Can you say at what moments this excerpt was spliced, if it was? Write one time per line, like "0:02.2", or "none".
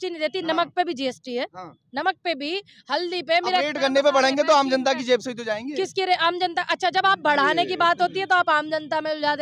none